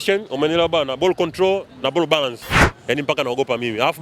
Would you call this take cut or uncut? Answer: cut